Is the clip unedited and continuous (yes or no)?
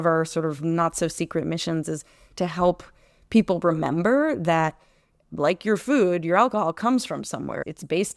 yes